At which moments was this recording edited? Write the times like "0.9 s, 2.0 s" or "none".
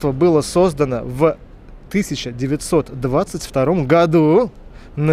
none

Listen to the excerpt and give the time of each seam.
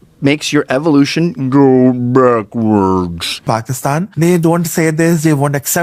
3.4 s

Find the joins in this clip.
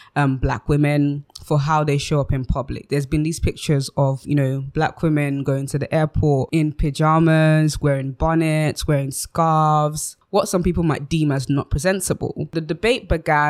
none

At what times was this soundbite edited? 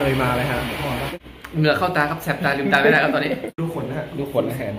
1.1 s, 3.5 s

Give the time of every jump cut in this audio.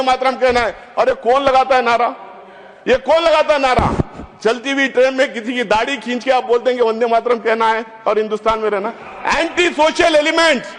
none

